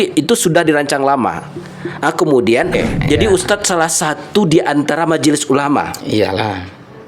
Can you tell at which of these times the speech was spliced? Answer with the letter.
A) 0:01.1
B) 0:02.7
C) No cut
B